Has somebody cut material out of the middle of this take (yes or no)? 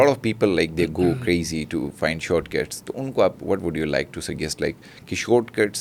no